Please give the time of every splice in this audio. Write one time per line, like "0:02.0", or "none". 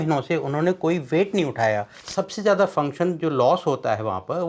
0:02.0